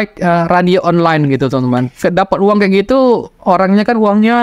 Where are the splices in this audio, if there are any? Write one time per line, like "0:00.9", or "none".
0:01.9